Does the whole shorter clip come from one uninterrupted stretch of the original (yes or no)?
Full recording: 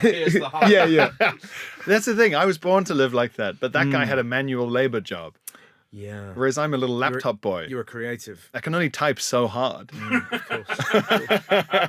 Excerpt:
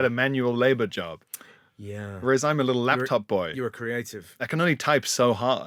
yes